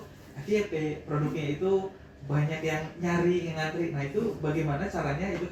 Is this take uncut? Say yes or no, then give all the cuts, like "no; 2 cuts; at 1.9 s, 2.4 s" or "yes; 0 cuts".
yes; 0 cuts